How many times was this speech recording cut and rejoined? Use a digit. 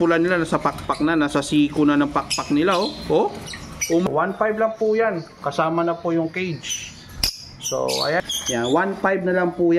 2